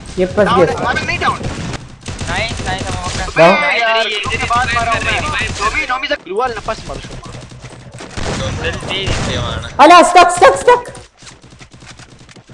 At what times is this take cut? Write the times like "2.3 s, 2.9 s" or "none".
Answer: 1.7 s, 6.2 s